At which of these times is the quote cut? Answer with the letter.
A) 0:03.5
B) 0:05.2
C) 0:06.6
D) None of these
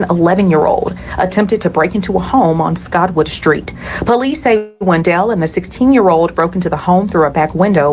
D